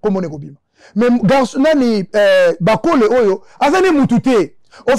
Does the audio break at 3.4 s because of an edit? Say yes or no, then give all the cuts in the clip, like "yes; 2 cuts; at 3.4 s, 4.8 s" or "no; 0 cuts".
no; 0 cuts